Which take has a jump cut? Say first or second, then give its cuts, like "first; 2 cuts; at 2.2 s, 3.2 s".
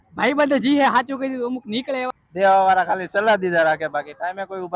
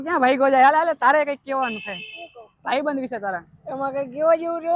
first; 1 cut; at 2.1 s